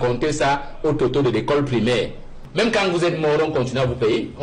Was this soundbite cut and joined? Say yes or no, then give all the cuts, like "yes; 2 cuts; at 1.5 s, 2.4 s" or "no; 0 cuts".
yes; 1 cut; at 2.4 s